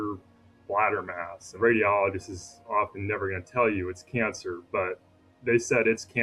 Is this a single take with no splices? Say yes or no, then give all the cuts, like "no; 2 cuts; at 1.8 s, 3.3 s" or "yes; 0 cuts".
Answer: no; 1 cut; at 1.5 s